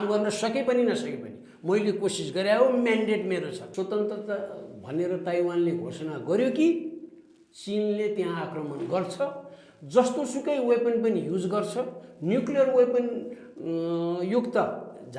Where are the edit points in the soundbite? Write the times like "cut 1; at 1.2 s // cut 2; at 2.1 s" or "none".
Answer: cut 1; at 3.6 s